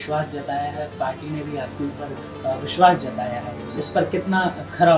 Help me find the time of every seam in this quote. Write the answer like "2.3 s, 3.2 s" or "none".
none